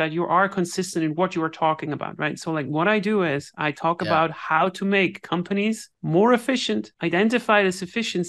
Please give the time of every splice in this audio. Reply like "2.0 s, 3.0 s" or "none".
5.9 s, 6.9 s

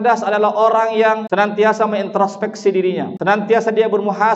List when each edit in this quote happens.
1.2 s, 3.1 s

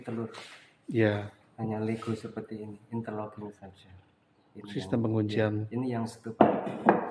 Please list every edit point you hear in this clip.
none

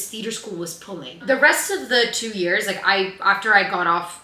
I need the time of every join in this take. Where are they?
none

